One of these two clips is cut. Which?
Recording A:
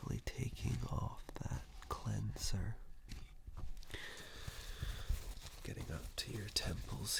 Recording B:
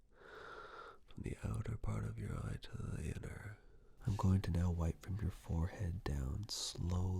B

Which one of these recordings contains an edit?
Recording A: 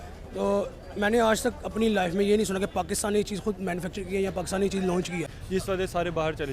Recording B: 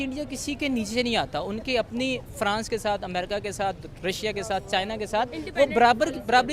A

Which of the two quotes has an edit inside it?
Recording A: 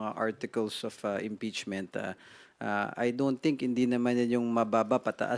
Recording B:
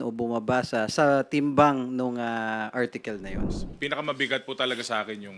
B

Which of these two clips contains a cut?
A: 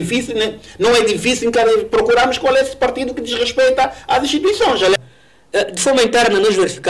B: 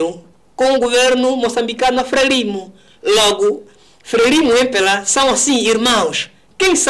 A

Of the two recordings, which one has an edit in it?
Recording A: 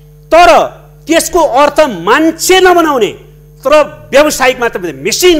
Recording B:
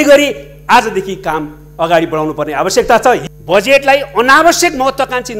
B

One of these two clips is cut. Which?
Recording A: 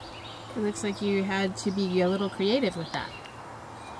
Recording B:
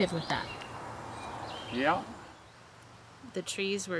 B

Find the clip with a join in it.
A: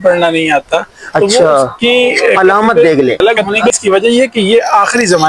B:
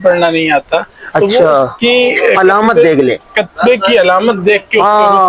A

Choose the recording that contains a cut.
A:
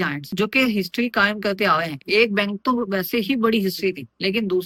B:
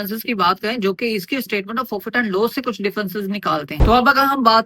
B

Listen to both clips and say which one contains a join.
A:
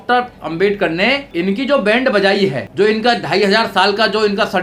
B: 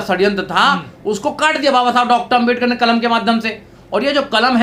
A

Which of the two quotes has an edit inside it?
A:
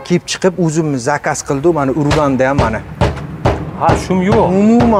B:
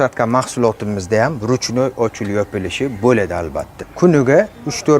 B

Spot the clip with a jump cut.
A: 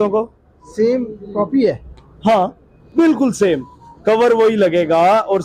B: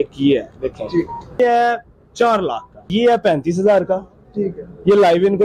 B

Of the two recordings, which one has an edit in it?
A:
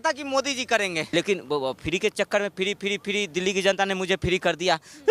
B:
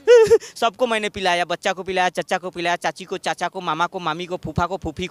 A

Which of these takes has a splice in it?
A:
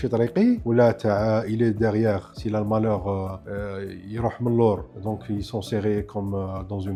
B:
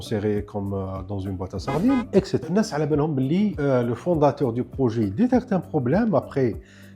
B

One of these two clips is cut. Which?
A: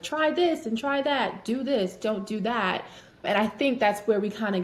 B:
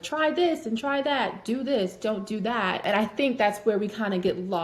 B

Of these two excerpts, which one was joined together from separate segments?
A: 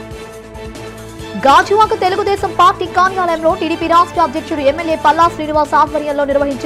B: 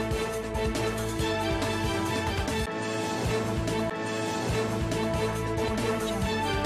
B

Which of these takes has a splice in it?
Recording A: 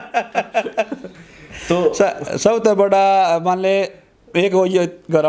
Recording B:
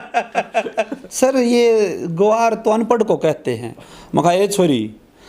B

